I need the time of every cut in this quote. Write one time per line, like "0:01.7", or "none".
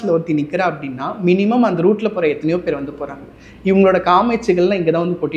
none